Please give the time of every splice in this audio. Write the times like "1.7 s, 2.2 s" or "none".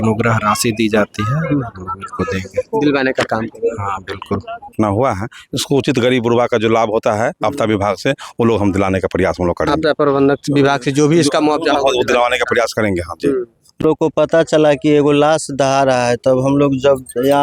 4.7 s, 13.8 s